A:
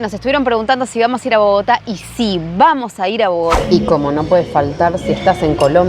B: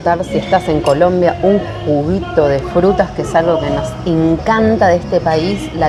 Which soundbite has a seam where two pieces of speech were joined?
A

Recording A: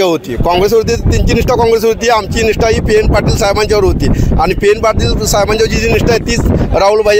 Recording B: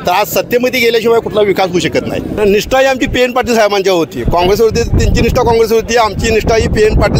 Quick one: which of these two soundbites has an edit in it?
B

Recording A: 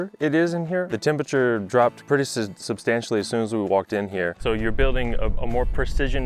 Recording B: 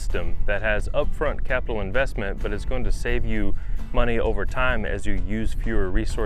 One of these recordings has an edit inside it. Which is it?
A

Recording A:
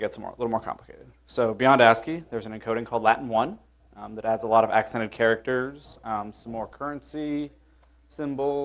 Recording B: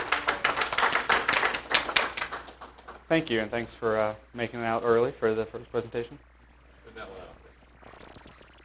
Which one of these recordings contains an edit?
A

